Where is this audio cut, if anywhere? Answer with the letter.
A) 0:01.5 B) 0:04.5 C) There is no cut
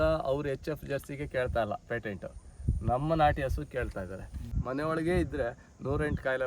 B